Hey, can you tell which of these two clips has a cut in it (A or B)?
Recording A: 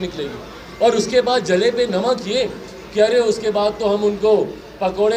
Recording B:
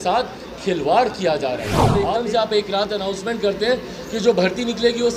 B